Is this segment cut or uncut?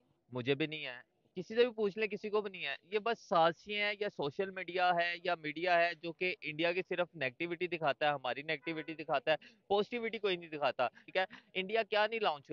cut